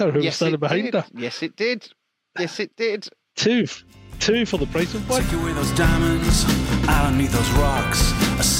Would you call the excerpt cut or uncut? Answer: cut